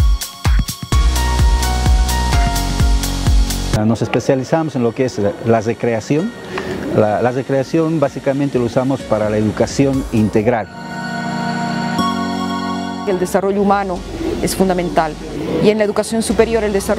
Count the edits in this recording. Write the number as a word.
one